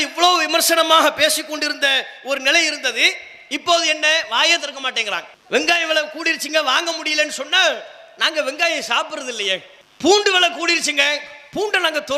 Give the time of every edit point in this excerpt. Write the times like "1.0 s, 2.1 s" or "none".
none